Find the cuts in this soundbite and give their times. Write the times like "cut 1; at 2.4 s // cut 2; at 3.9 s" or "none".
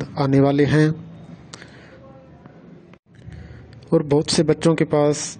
none

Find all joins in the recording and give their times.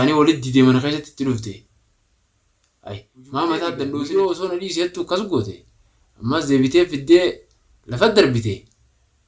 cut 1; at 4.1 s

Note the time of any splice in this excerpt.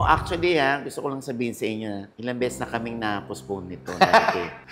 none

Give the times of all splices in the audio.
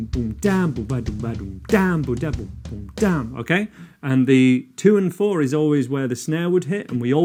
none

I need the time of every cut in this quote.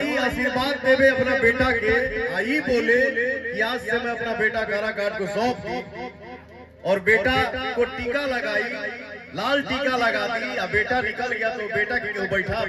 none

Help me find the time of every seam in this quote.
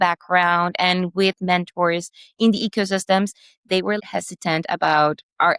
cut 1; at 4.0 s

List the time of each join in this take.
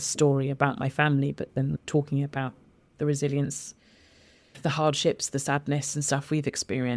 cut 1; at 1.8 s // cut 2; at 4.6 s

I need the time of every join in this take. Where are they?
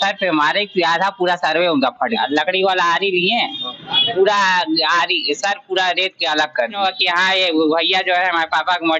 cut 1; at 2.2 s // cut 2; at 6.7 s

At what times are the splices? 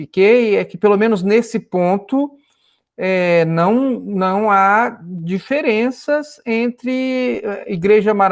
none

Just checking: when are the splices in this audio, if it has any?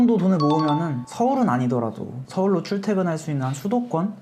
none

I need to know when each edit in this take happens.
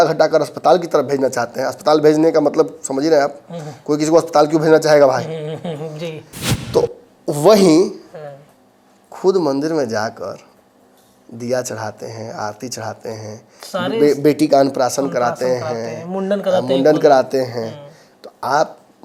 none

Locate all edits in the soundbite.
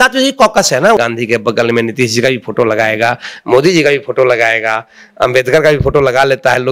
cut 1; at 1.0 s

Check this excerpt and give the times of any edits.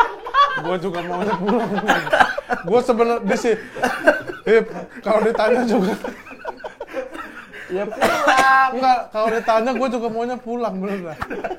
none

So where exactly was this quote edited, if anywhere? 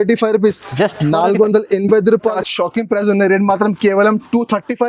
cut 1; at 2.4 s

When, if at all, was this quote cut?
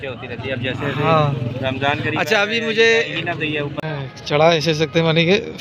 cut 1; at 3.9 s

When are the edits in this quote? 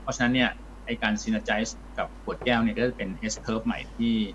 cut 1; at 1.8 s

